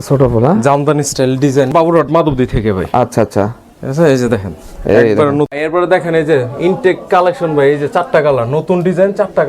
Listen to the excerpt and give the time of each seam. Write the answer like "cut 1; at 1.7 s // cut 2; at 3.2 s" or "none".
cut 1; at 1.7 s // cut 2; at 5.5 s

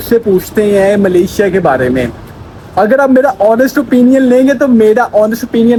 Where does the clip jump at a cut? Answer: none

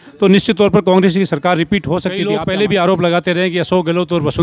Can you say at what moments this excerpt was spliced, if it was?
cut 1; at 2.1 s

